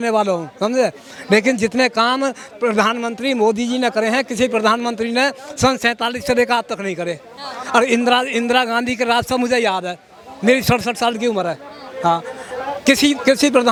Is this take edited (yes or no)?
no